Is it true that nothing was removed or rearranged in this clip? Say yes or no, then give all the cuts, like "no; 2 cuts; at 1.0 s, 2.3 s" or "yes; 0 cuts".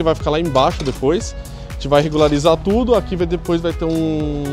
yes; 0 cuts